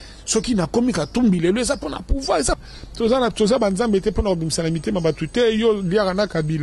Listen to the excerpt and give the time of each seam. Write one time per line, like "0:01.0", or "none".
0:02.7